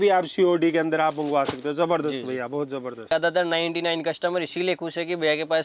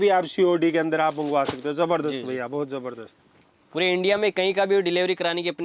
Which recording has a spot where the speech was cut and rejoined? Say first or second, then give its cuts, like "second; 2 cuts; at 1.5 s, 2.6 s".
first; 1 cut; at 3.1 s